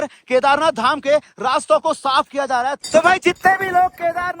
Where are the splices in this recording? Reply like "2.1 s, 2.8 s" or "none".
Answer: 2.8 s